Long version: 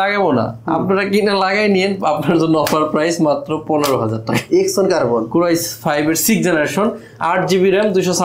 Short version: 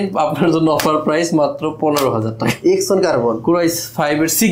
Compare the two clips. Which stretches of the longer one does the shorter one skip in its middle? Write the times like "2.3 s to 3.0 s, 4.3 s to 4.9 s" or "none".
none